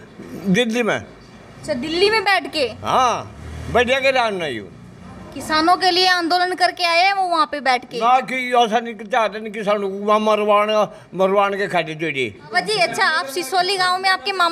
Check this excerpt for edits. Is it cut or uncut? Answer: cut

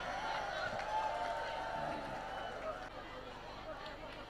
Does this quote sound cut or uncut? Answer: cut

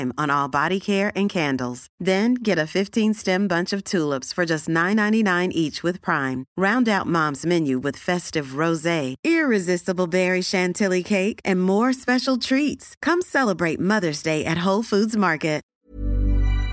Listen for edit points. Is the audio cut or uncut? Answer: cut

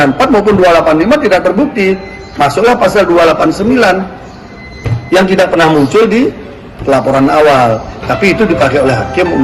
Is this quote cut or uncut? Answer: uncut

